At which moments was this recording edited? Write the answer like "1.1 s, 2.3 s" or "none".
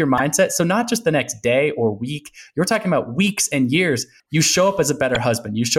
4.1 s